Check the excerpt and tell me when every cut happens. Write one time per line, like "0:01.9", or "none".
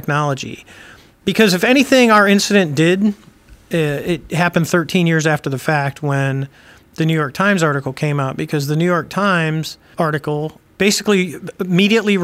0:09.8
0:10.6